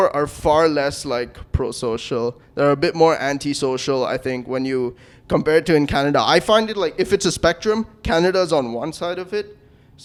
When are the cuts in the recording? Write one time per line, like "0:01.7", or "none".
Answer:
none